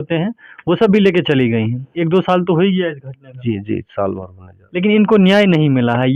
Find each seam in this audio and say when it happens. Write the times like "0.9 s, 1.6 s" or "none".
1.9 s